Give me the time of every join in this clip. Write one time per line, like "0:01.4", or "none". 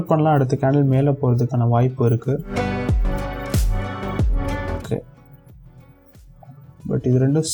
none